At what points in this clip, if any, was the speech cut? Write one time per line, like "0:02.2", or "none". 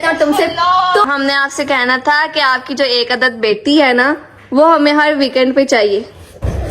0:01.1